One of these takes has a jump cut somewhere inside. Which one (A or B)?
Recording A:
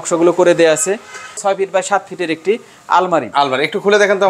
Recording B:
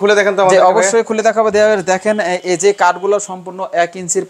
A